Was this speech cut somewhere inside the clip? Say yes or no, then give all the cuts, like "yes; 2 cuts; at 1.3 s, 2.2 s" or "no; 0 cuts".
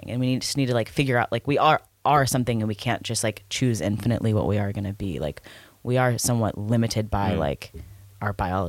no; 0 cuts